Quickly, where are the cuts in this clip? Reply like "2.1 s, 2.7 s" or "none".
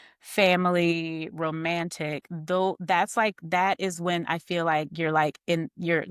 none